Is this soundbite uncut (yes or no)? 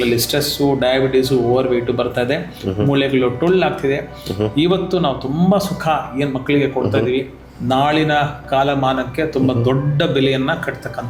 yes